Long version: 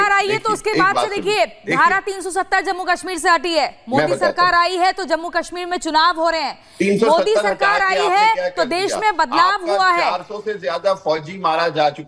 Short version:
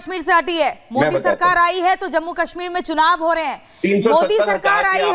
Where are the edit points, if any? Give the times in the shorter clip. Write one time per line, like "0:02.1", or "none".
none